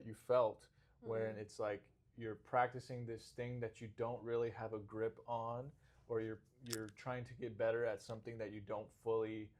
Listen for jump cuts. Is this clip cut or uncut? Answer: uncut